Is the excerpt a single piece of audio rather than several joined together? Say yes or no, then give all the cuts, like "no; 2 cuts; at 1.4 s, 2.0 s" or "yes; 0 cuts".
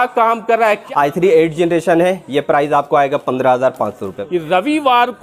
no; 2 cuts; at 0.8 s, 4.1 s